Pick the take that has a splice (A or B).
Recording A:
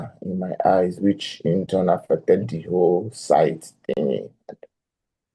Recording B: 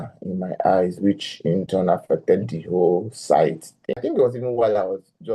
B